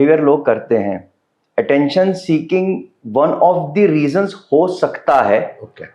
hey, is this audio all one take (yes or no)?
no